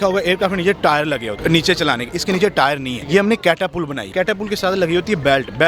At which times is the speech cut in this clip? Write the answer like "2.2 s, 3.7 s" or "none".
1.3 s, 2.9 s, 4.1 s